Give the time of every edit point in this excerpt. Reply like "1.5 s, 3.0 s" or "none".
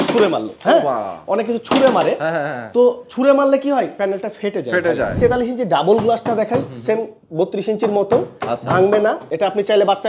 5.2 s, 9.3 s